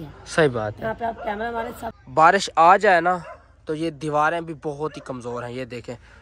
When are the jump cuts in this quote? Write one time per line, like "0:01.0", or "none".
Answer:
0:02.0